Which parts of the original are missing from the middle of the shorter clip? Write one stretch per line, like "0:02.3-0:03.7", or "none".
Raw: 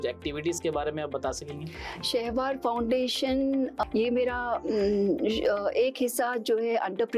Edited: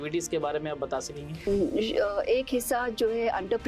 0:01.8-0:05.0